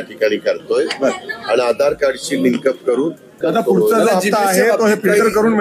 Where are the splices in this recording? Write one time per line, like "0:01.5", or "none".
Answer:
0:03.4

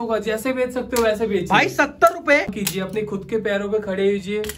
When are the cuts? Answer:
0:02.6

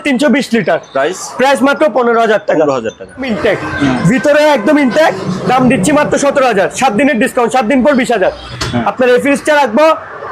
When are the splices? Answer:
0:03.3
0:08.5

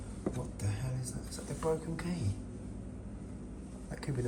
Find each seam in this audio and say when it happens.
none

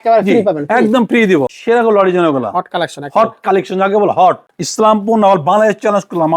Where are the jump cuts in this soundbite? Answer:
0:01.5
0:04.5

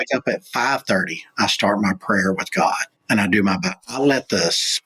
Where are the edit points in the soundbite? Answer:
0:02.9

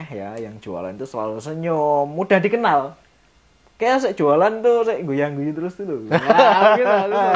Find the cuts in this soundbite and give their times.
none

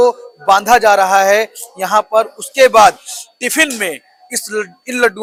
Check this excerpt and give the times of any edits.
none

